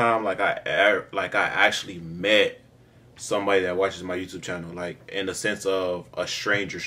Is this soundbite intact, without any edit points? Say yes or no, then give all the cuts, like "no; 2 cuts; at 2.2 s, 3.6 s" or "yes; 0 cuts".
yes; 0 cuts